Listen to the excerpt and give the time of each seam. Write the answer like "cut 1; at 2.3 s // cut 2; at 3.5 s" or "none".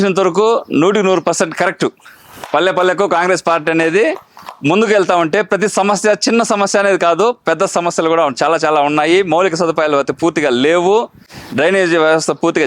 none

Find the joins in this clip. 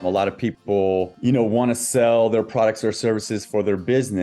cut 1; at 1.1 s

